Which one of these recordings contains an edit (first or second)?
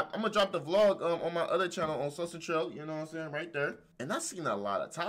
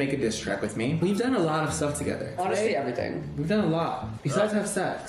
first